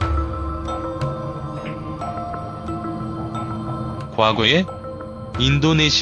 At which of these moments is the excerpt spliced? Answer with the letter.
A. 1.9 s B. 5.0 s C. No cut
C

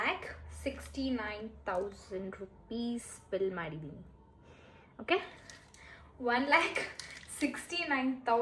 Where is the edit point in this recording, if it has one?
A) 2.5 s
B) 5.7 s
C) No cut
C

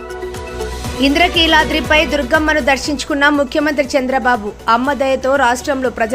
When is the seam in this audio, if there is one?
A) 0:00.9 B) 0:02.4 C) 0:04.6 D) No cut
A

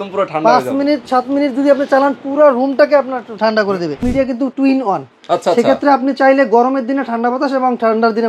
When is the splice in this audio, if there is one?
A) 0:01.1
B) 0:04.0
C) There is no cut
B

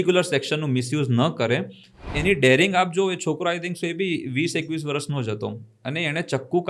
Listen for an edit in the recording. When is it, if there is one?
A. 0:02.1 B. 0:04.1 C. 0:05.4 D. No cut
A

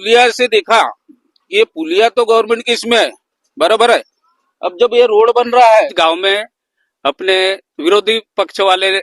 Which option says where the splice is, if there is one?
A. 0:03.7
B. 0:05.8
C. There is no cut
B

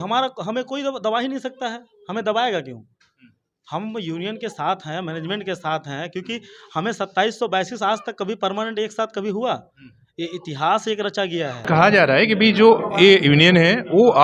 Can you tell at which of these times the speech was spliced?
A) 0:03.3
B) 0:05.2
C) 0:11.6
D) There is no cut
C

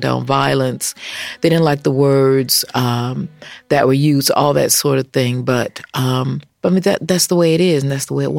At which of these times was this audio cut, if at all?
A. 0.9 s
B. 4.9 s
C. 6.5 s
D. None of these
C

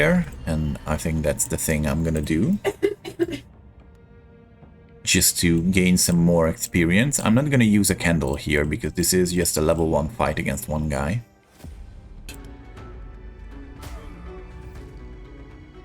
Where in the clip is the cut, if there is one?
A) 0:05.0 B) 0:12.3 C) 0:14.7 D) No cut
B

